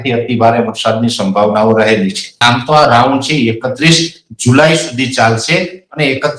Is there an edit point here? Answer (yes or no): yes